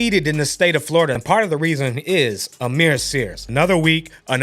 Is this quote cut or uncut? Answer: cut